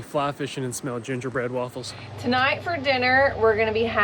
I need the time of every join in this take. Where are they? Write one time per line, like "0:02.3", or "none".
0:02.2